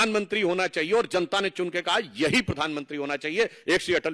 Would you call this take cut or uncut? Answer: uncut